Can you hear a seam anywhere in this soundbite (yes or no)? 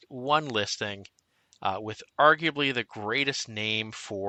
no